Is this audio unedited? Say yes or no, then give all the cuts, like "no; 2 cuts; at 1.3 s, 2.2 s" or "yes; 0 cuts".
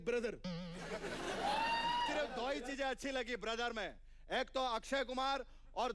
no; 1 cut; at 2.1 s